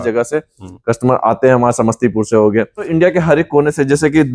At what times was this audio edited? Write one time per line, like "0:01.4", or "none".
0:02.9